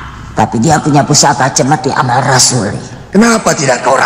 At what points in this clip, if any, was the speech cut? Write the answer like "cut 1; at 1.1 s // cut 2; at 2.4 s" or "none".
cut 1; at 2.9 s